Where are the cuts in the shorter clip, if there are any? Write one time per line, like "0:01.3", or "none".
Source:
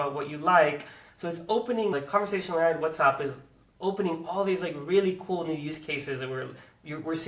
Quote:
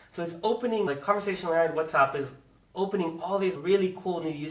0:03.6